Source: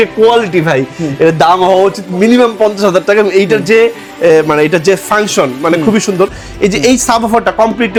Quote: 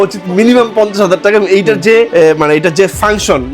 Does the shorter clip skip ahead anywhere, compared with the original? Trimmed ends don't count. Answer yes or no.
yes